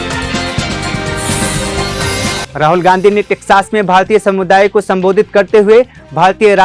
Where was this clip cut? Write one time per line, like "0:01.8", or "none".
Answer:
0:02.5